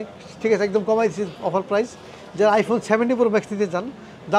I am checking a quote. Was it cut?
no; 0 cuts

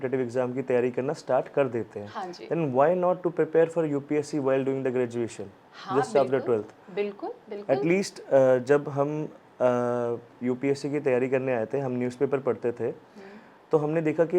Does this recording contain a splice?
no; 0 cuts

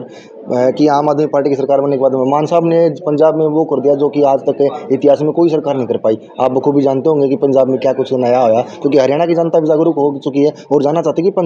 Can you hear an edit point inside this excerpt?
no; 0 cuts

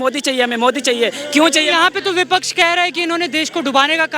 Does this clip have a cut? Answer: no; 0 cuts

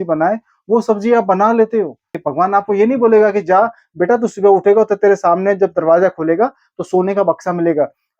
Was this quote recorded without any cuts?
no; 1 cut; at 2.2 s

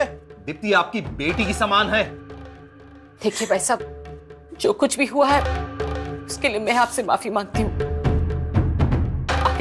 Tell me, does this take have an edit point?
no; 0 cuts

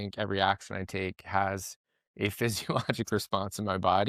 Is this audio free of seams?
yes; 0 cuts

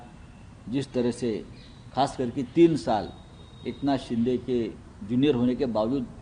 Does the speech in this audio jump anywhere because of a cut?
no; 0 cuts

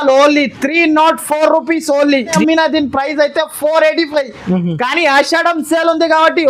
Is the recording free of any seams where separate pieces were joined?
no; 1 cut; at 2.4 s

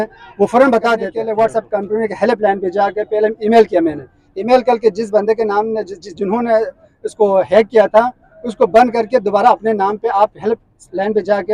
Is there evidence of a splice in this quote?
yes; 1 cut; at 1.2 s

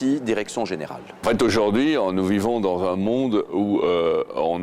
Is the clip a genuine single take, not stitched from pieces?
no; 1 cut; at 1.1 s

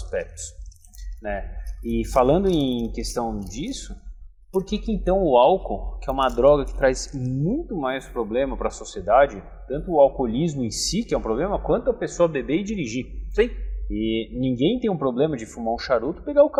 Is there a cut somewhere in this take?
no; 0 cuts

